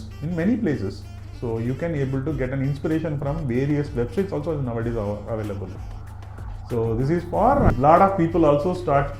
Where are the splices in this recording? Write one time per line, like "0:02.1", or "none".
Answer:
0:07.7